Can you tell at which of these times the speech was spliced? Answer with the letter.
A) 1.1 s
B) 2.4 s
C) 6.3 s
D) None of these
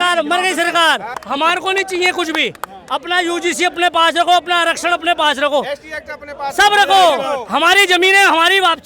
A